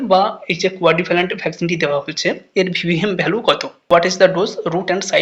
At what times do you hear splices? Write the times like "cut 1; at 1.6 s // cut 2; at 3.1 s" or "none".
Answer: cut 1; at 3.8 s